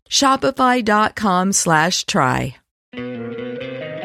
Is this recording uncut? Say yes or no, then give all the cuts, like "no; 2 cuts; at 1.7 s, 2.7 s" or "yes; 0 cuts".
yes; 0 cuts